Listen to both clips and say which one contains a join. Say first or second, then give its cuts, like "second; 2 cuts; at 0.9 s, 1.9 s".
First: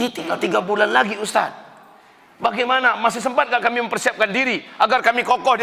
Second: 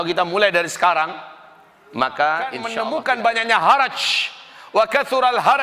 second; 1 cut; at 2.7 s